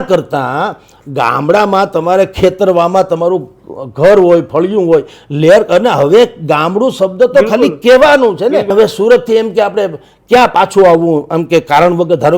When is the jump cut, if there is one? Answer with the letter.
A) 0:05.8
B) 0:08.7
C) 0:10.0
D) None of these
B